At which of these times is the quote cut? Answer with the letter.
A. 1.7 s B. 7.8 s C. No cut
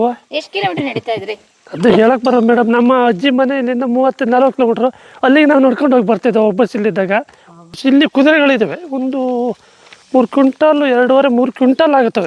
B